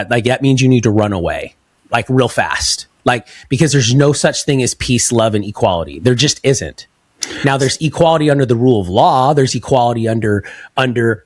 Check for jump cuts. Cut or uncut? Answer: uncut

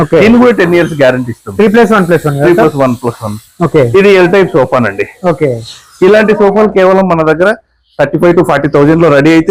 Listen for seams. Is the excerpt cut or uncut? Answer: uncut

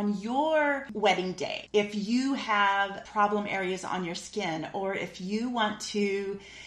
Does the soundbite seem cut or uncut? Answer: cut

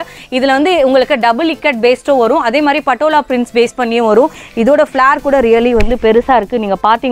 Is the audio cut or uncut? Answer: cut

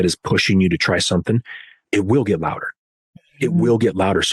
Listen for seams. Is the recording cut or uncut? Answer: cut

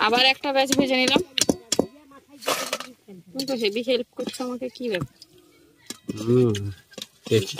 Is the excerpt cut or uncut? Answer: uncut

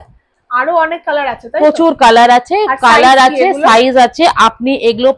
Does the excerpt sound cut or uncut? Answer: uncut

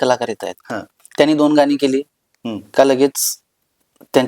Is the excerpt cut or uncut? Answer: uncut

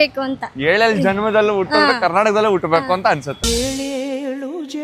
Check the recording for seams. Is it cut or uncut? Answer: uncut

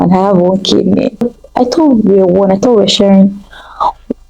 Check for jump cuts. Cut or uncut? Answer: cut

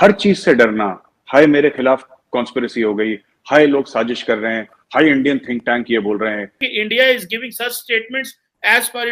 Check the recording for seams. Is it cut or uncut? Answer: cut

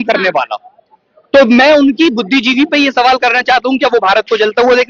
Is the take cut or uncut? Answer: uncut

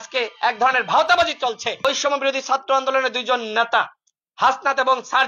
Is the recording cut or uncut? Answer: cut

